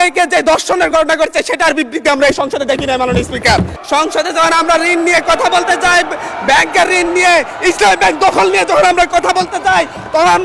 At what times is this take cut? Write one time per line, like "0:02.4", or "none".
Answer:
0:03.8